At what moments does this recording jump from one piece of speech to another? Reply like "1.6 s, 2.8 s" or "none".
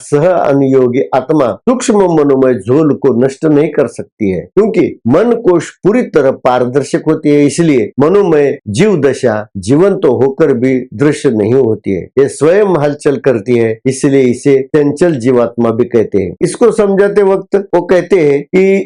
none